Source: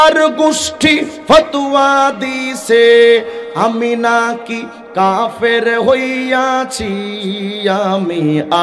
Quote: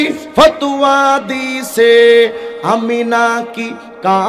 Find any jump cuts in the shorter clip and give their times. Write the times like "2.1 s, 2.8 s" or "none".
none